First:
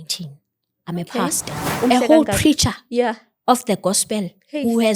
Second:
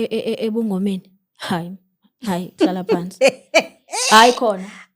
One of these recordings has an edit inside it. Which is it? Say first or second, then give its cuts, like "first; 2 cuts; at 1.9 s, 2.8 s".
first; 1 cut; at 1.7 s